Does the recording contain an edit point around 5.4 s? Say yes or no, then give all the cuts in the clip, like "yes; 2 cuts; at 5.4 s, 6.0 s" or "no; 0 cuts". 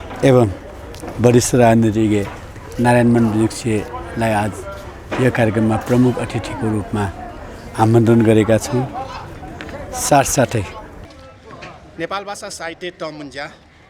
no; 1 cut; at 11.0 s